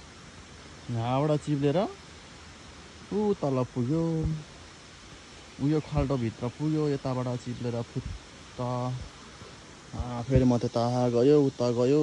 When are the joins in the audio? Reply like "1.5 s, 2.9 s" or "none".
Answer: none

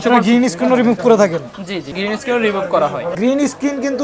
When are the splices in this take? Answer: 1.9 s, 3.1 s

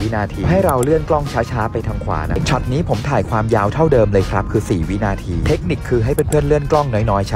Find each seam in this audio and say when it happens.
2.4 s, 5.2 s

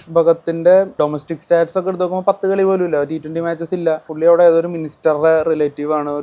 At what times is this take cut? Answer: 1.0 s, 4.1 s

